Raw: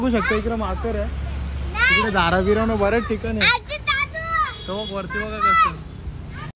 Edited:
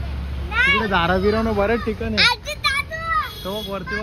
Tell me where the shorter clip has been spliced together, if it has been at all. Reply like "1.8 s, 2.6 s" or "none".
none

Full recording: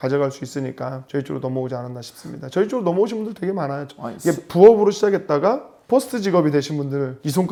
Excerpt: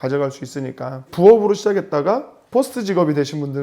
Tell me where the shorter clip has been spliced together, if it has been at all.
1.1 s

